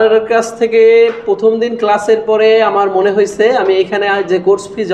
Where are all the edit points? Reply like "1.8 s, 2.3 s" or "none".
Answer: none